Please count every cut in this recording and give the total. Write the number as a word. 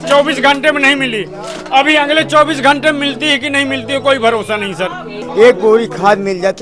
one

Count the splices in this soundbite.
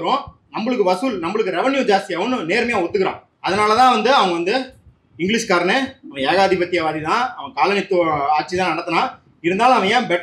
one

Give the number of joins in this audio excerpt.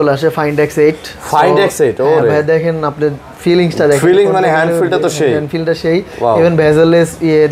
zero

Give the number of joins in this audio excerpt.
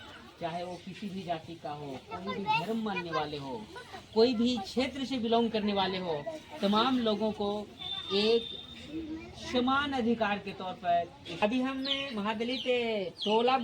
one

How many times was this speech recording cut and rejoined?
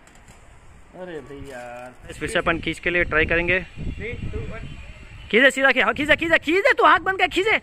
one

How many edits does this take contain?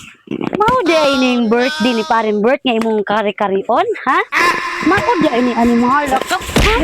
zero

